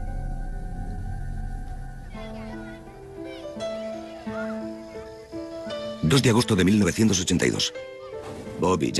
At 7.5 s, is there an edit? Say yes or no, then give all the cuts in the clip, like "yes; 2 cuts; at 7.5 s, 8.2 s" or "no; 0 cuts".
no; 1 cut; at 4.0 s